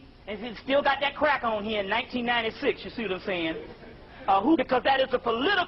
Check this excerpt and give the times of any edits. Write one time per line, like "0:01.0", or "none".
none